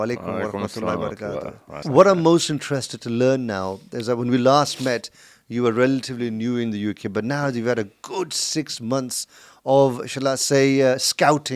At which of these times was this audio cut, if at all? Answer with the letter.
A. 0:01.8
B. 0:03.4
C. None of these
A